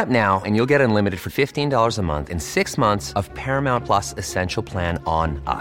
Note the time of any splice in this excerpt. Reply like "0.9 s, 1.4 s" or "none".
none

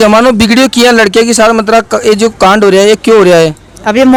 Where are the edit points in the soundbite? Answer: none

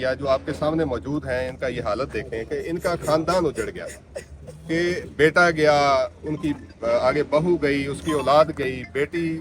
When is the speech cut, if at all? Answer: none

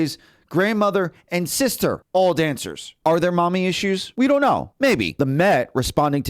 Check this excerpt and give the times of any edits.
2.0 s, 2.9 s, 4.1 s, 4.9 s

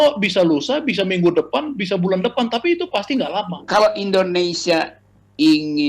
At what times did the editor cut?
3.7 s

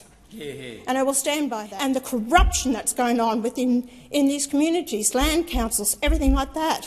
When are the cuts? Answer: 1.7 s

